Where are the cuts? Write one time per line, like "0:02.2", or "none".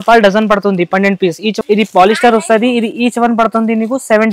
0:01.5

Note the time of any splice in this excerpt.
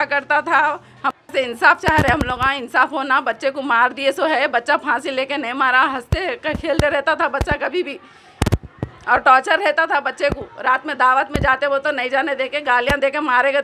0:01.1

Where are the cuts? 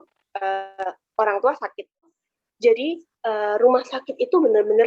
0:02.1

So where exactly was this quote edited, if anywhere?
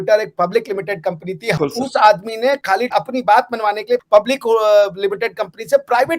0:01.5
0:04.0

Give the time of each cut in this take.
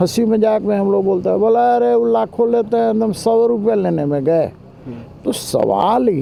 none

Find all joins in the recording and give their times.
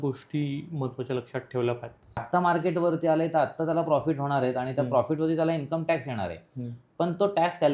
0:02.2

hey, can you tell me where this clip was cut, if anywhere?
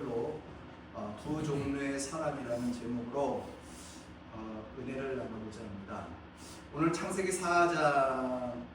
none

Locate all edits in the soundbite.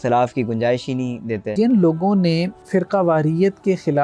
0:01.5
0:02.6

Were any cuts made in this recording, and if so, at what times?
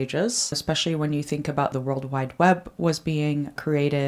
0:01.7

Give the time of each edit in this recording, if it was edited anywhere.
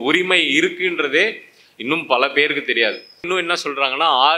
0:03.2

